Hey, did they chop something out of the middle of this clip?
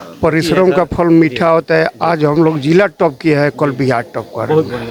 no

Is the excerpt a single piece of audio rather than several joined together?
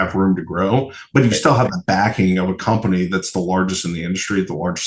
yes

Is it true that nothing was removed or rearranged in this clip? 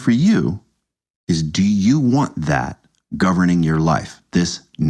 yes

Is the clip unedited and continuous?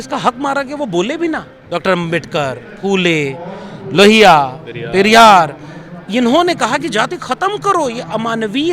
no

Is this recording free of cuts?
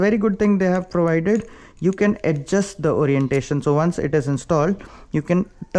yes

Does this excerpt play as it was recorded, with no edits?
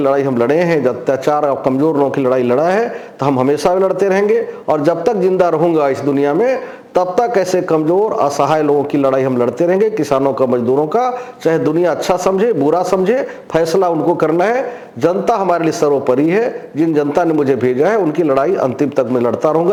yes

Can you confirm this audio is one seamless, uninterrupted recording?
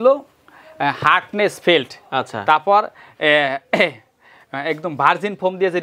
yes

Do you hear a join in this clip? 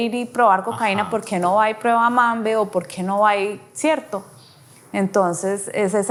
no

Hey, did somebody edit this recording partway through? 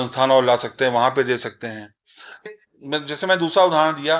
yes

